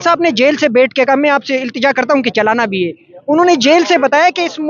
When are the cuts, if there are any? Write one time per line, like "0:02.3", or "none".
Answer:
none